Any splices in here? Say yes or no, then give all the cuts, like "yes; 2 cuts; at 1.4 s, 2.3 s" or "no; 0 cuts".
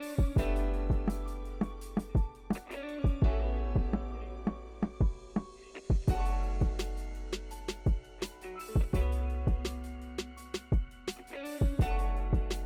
no; 0 cuts